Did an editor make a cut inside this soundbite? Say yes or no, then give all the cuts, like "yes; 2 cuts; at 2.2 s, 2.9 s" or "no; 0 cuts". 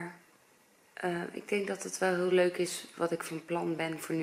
no; 0 cuts